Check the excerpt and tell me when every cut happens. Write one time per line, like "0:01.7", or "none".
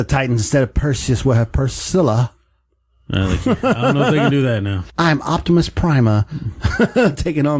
0:04.8